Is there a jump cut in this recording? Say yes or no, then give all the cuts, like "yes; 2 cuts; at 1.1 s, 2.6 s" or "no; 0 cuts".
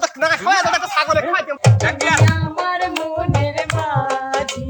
yes; 1 cut; at 1.6 s